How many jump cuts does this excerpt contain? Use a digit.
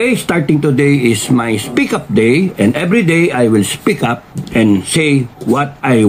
0